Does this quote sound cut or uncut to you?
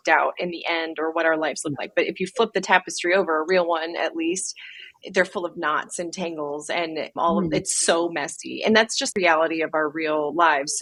uncut